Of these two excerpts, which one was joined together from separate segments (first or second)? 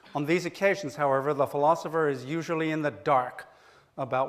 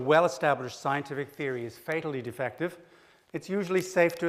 second